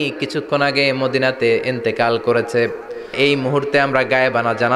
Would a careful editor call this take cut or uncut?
cut